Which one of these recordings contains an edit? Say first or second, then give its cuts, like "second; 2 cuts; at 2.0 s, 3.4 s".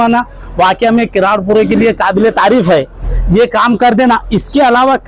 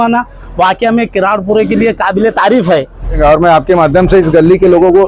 second; 1 cut; at 3.2 s